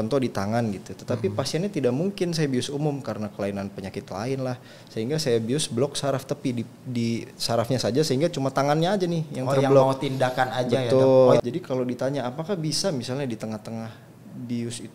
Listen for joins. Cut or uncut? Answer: cut